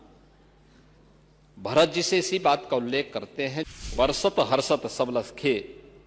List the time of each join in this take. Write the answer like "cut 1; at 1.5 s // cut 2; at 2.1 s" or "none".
cut 1; at 3.8 s